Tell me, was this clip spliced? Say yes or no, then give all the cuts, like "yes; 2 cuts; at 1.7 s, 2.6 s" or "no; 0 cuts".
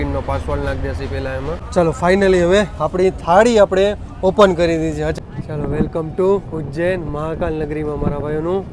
yes; 2 cuts; at 1.6 s, 5.1 s